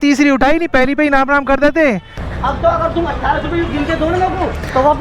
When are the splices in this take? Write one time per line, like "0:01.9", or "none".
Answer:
0:02.1